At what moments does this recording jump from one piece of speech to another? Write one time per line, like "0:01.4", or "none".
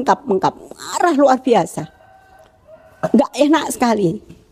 none